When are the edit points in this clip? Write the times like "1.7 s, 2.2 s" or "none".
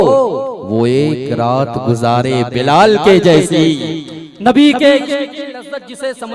none